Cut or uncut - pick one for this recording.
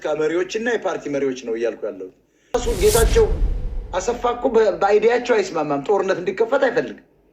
cut